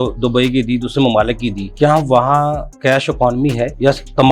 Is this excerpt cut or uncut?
cut